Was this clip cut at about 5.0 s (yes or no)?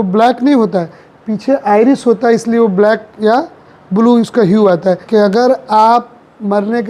yes